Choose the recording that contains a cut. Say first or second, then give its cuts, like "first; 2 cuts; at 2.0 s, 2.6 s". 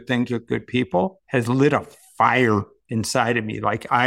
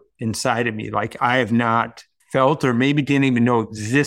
first; 1 cut; at 1.2 s